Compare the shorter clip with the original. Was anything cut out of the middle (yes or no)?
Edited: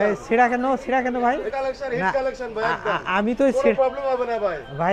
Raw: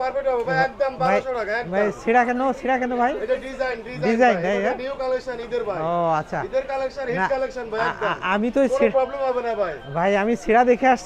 yes